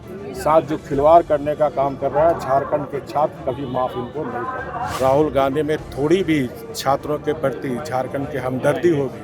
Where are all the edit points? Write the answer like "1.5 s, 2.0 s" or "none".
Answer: 4.9 s